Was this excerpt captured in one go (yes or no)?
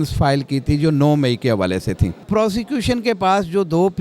no